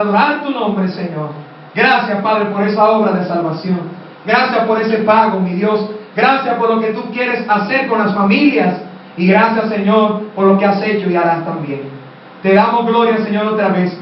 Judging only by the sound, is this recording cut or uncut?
uncut